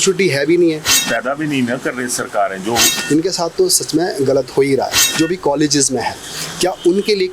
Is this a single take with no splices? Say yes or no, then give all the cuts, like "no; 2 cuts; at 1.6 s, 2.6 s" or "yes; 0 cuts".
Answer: no; 3 cuts; at 0.9 s, 2.9 s, 5.0 s